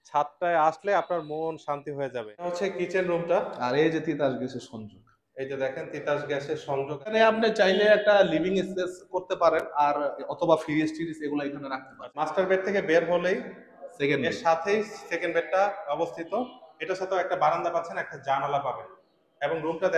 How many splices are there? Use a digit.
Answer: 3